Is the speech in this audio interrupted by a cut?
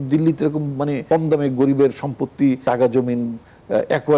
yes; 2 cuts; at 1.0 s, 2.6 s

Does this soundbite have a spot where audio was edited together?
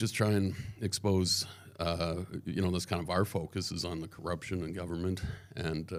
no; 0 cuts

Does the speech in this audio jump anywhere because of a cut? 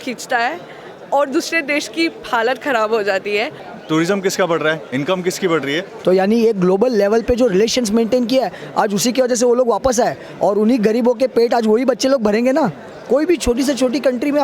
yes; 3 cuts; at 3.6 s, 5.9 s, 12.9 s

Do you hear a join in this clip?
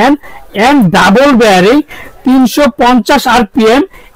no; 0 cuts

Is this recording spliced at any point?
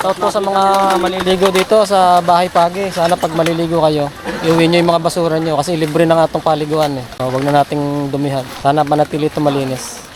yes; 2 cuts; at 7.1 s, 8.5 s

